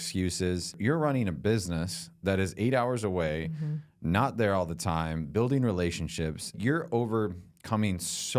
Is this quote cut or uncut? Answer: cut